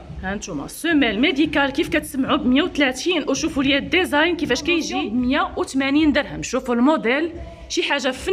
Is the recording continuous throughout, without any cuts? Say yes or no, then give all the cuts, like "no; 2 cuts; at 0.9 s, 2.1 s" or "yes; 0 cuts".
no; 1 cut; at 5.0 s